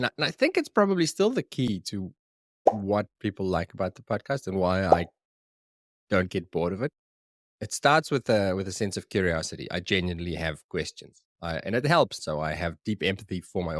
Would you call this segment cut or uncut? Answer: cut